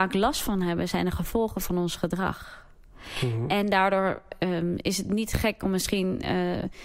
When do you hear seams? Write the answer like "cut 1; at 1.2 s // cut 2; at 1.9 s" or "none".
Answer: none